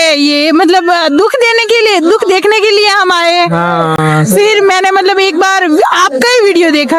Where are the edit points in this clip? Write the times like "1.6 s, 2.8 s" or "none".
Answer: none